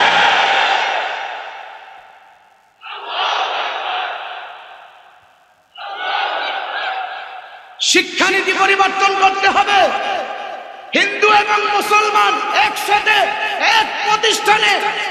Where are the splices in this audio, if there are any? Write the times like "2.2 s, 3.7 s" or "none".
none